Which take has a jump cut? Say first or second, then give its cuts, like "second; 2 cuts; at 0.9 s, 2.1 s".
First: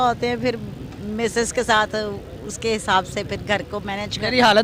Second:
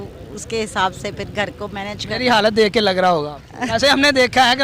second; 1 cut; at 3.7 s